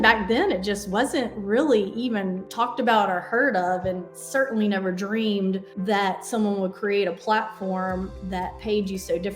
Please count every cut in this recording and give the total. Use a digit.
2